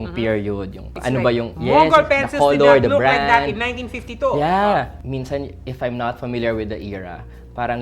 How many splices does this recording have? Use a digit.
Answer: 1